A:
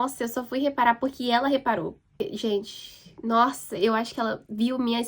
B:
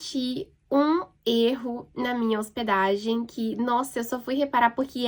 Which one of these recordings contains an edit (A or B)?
A